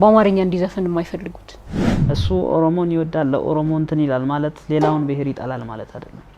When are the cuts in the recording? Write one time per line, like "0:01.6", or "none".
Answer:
0:01.9